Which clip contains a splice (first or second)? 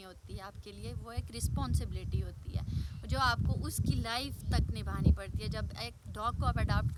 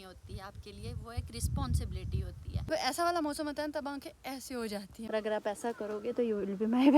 second